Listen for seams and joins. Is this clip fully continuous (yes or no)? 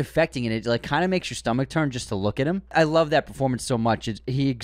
no